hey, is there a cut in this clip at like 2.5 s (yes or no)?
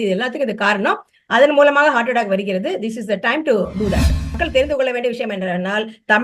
no